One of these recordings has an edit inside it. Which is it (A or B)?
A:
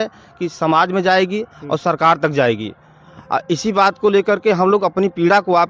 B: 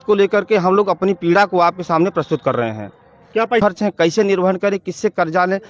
B